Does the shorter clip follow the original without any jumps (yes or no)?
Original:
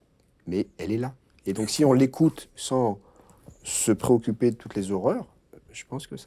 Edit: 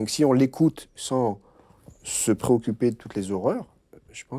yes